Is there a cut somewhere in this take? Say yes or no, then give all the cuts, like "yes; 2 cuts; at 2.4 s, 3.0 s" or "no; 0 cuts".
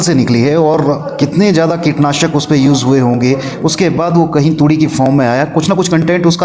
no; 0 cuts